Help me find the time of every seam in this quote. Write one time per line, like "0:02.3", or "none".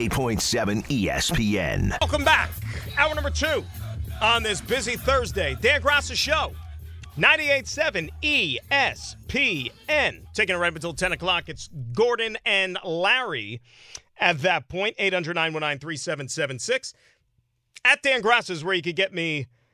none